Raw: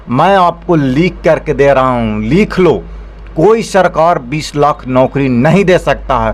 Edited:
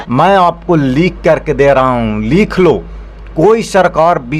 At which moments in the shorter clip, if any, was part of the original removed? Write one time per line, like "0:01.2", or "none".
none